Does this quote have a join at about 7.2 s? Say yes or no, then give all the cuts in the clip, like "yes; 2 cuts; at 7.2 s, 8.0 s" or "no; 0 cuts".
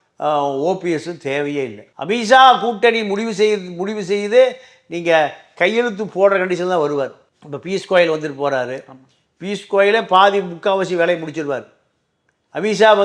no; 0 cuts